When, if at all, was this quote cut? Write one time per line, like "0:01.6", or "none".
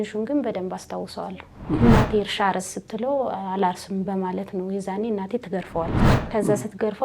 0:01.8
0:06.1